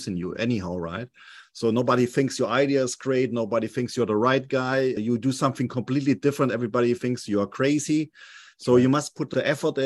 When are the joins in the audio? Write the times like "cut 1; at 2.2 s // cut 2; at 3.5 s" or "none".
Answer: none